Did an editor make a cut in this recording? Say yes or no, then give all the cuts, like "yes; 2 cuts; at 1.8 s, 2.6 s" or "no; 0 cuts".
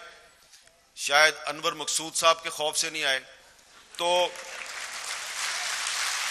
no; 0 cuts